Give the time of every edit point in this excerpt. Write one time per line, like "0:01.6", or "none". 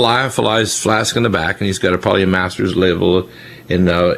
none